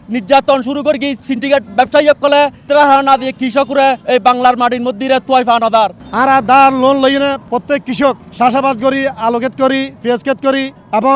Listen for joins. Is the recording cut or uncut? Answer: cut